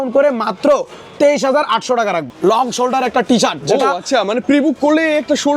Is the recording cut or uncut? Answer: cut